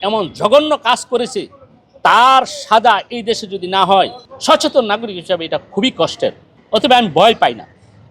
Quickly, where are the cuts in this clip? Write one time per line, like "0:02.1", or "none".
0:04.3
0:06.5